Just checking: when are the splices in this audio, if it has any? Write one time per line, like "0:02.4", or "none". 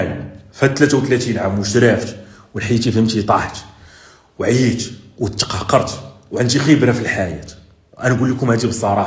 none

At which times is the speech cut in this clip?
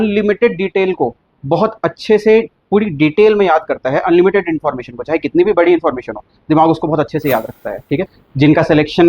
0:08.2

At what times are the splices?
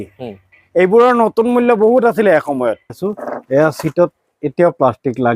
0:03.0

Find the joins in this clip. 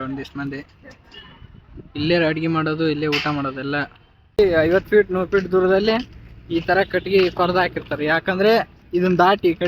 0:04.4

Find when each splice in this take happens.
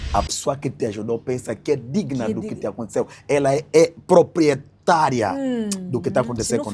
none

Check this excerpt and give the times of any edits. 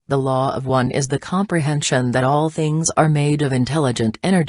0:00.9

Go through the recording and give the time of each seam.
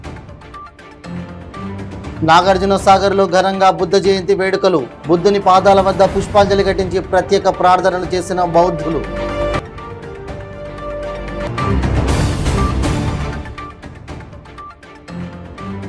none

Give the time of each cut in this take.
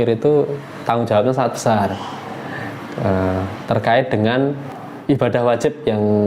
none

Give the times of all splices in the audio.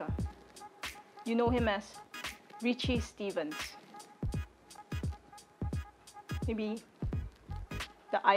none

